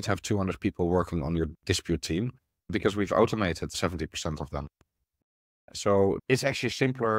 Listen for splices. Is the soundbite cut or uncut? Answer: cut